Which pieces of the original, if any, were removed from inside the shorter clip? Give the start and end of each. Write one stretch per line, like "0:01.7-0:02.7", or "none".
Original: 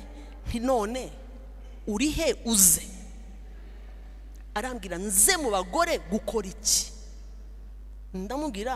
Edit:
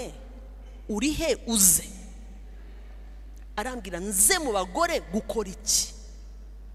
none